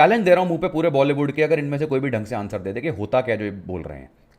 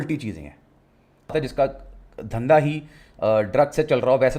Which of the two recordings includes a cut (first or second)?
second